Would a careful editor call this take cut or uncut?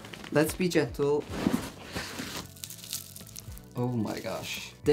uncut